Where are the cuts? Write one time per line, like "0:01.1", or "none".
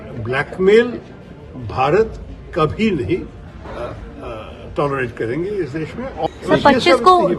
0:06.3